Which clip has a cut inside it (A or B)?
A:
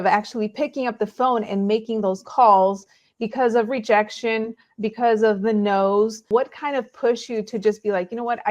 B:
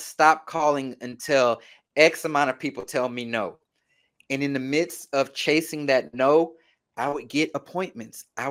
A